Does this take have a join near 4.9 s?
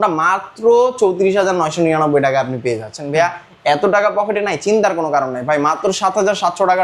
no; 0 cuts

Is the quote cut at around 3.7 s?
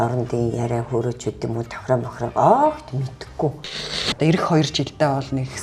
yes; 1 cut; at 3.7 s

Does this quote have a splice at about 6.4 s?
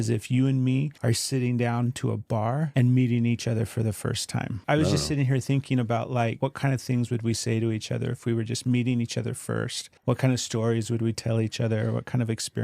yes; 5 cuts; at 0.9 s, 2.7 s, 4.6 s, 6.4 s, 9.8 s

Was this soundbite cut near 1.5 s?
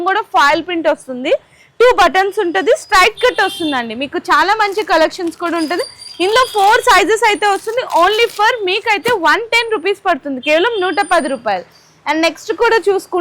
no; 0 cuts

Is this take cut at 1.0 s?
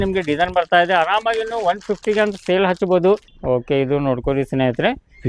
no; 1 cut; at 3.3 s

